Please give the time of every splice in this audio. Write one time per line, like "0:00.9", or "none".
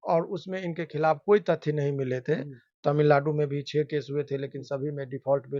none